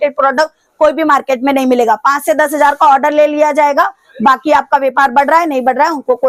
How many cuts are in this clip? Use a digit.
0